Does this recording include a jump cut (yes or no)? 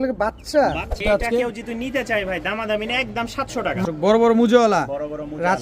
yes